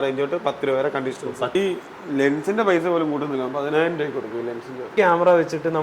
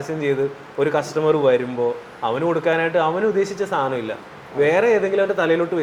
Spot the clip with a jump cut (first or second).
first